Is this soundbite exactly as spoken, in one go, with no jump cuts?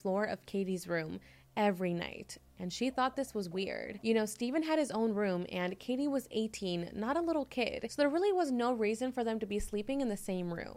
yes; 0 cuts

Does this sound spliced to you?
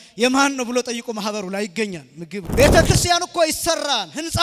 yes; 1 cut; at 2.5 s

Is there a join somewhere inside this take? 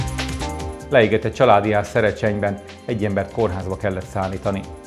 no; 0 cuts

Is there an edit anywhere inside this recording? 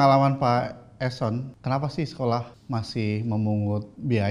yes; 2 cuts; at 1.5 s, 2.6 s

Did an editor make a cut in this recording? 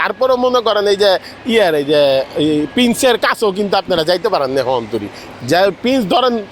no; 0 cuts

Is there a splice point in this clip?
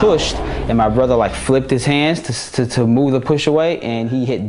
no; 0 cuts

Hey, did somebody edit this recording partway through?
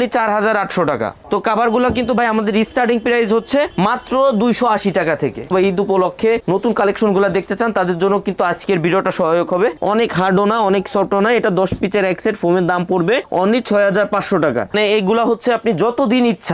yes; 4 cuts; at 1.2 s, 5.5 s, 9.8 s, 14.7 s

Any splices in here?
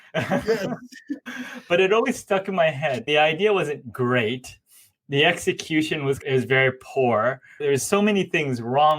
yes; 2 cuts; at 1.1 s, 3.0 s

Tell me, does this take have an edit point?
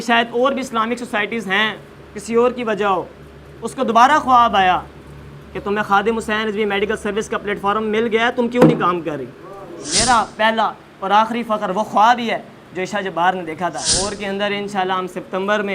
yes; 2 cuts; at 9.9 s, 13.9 s

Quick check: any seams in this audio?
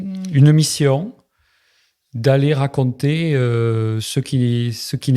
no; 0 cuts

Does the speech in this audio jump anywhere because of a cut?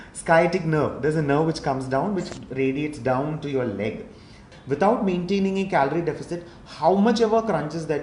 yes; 1 cut; at 4.5 s

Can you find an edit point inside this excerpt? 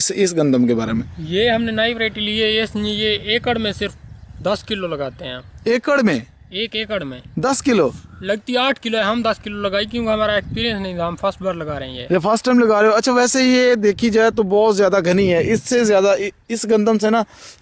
no; 0 cuts

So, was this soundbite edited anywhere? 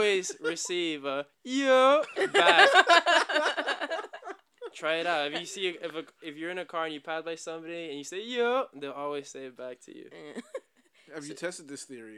no; 0 cuts

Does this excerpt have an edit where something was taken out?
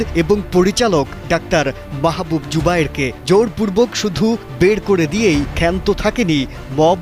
yes; 1 cut; at 1.2 s

